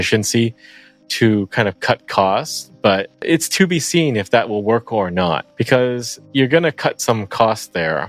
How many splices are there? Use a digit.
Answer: 3